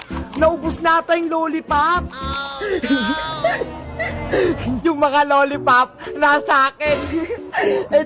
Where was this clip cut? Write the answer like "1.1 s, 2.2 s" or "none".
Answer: 4.8 s